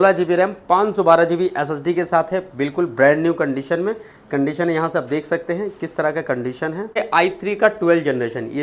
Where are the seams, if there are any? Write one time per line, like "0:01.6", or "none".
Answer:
0:07.0